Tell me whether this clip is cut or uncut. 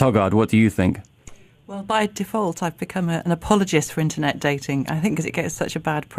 uncut